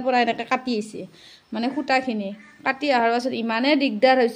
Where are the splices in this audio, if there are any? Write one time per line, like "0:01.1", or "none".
none